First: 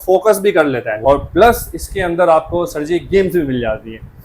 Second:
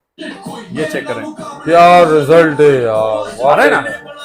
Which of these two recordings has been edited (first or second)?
first